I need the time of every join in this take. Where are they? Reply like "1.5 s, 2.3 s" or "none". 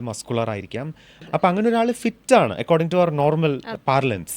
1.1 s